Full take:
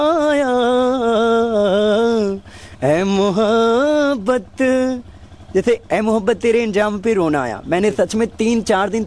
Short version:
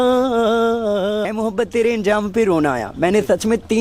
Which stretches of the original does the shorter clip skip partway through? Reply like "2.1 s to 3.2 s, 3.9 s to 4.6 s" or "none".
1.9 s to 5.9 s